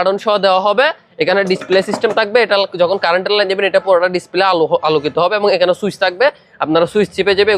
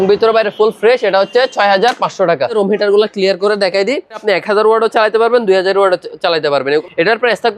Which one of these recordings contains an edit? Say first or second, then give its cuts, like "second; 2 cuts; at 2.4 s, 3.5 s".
second; 3 cuts; at 2.5 s, 4.1 s, 6.8 s